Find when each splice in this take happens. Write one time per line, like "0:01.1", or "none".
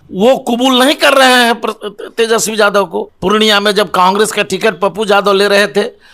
0:03.0